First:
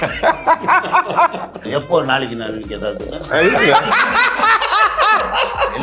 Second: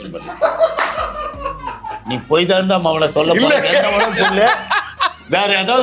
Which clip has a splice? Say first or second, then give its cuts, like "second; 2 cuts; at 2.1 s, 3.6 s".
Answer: first; 1 cut; at 1.6 s